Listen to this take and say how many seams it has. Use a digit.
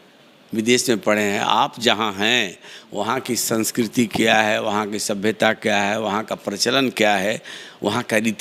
0